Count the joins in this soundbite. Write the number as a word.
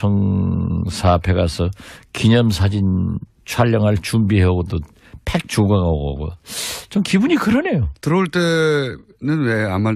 one